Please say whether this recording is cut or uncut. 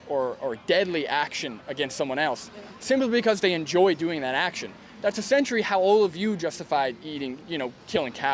uncut